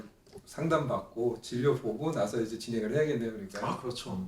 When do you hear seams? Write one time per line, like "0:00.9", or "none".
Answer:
none

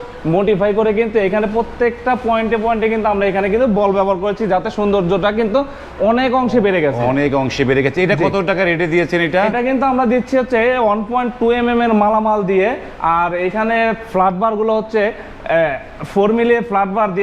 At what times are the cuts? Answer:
none

